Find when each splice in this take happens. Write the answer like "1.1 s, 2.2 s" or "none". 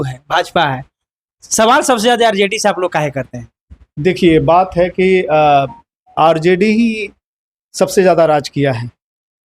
none